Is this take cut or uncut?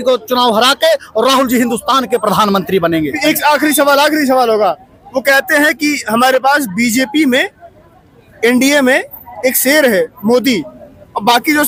uncut